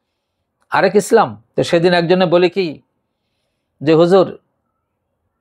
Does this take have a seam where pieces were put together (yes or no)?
yes